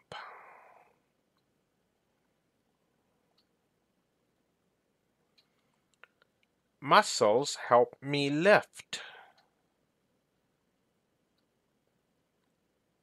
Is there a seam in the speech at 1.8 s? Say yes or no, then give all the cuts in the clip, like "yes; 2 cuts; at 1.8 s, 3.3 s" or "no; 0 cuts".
no; 0 cuts